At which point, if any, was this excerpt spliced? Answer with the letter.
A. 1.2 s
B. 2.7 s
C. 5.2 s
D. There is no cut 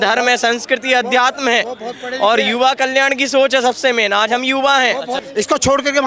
C